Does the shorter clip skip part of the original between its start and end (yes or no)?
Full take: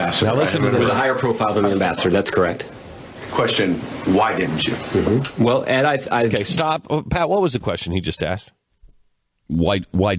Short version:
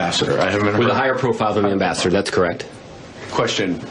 no